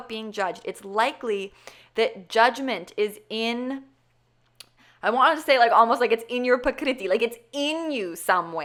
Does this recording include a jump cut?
no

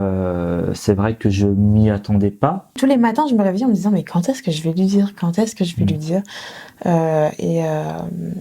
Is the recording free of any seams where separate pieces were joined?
no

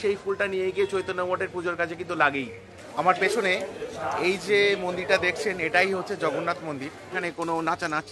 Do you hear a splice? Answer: yes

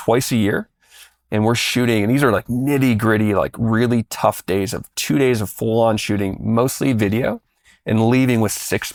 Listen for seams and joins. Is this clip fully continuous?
yes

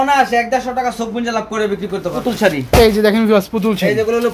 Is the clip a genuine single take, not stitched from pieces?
no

